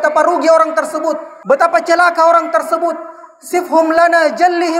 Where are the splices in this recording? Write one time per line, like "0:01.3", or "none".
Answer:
0:01.3